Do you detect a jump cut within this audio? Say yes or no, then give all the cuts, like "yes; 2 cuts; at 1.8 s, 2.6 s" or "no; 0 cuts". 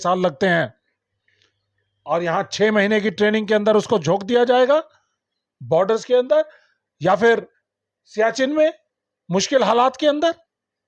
no; 0 cuts